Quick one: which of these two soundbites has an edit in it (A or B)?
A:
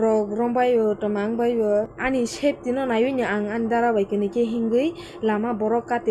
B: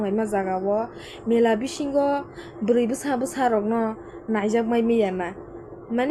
A